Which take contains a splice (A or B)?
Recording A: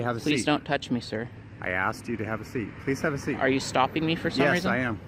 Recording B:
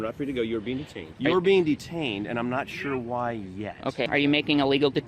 B